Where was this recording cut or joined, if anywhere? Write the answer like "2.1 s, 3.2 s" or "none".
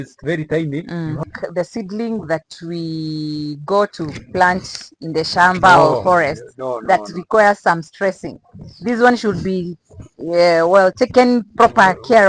1.3 s